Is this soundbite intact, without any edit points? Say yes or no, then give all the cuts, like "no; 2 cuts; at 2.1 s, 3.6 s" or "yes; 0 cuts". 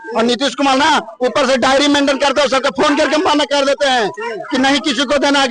yes; 0 cuts